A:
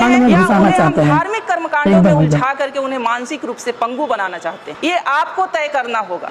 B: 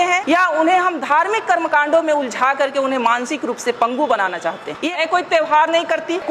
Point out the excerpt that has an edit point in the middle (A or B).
B